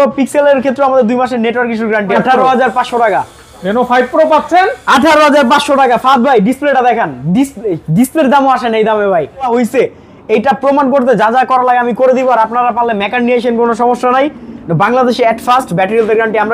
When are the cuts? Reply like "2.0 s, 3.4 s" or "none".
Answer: 2.1 s, 9.5 s